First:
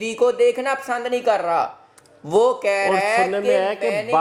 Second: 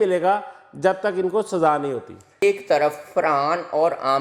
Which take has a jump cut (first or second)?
second